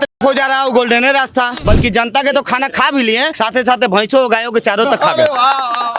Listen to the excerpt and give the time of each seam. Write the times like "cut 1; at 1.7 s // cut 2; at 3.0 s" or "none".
cut 1; at 1.6 s // cut 2; at 3.3 s